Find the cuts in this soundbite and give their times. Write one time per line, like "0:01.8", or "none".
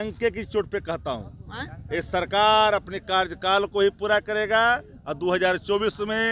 none